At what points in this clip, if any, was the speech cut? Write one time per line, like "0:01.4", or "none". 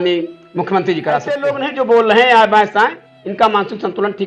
0:01.4

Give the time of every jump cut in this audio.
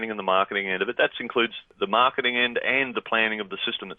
0:01.7

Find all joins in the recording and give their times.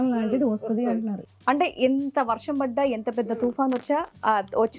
0:01.2

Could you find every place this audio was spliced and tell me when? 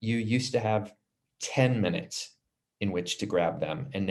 none

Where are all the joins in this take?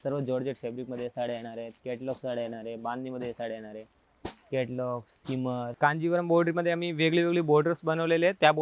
0:05.7

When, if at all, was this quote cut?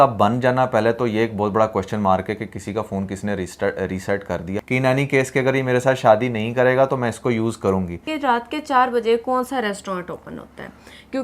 0:04.5
0:08.1

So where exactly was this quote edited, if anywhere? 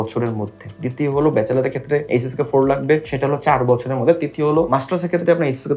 0:02.1
0:03.1
0:04.7

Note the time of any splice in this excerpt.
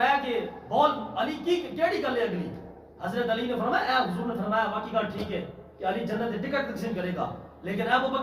none

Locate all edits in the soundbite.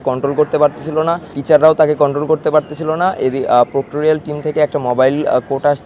0:01.4

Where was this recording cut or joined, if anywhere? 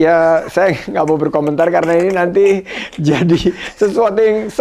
none

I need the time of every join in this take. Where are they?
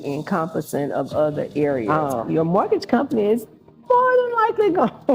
0:01.9

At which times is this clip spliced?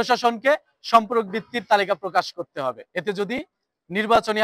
0:02.9

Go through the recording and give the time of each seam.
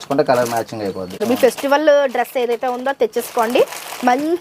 0:01.2

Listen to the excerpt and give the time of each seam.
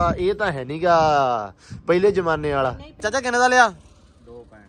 0:03.0

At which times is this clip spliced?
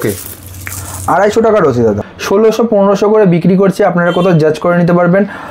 0:02.0

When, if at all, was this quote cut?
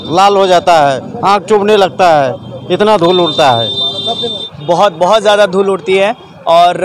0:04.5

